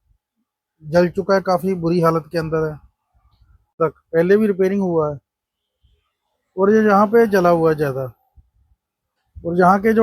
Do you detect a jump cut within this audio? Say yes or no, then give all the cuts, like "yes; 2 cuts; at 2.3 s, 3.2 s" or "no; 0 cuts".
yes; 1 cut; at 3.8 s